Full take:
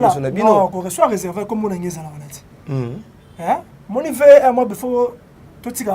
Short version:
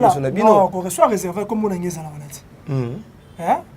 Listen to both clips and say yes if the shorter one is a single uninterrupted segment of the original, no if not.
yes